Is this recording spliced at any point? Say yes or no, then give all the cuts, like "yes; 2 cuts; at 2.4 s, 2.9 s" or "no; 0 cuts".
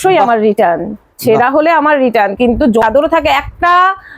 yes; 1 cut; at 2.8 s